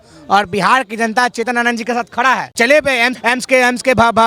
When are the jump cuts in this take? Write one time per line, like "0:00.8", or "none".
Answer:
0:02.5
0:03.2